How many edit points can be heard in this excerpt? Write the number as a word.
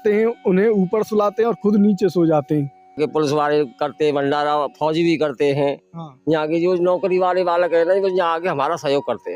one